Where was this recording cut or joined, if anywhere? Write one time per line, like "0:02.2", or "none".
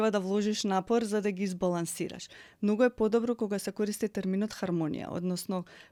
none